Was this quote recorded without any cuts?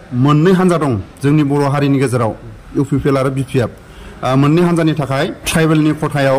no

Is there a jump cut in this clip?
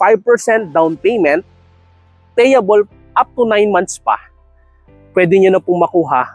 no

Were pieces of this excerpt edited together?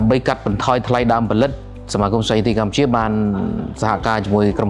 no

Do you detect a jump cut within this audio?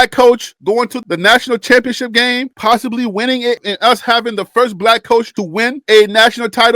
yes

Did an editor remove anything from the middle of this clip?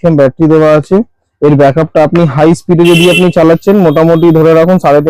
no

